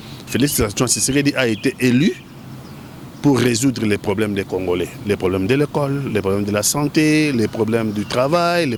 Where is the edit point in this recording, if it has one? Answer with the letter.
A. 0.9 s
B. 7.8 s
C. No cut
C